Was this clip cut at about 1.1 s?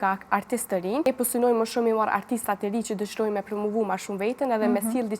yes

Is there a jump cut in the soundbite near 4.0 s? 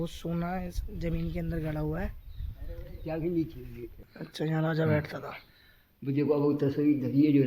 yes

